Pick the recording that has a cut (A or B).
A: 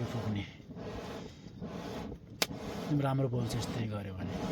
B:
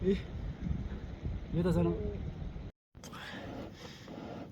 B